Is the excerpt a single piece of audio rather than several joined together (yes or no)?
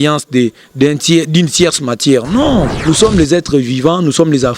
no